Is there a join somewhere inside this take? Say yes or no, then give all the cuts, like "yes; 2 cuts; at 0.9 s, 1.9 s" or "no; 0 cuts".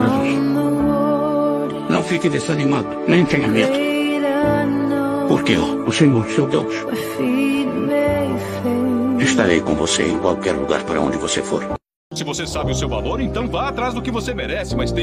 yes; 1 cut; at 12.0 s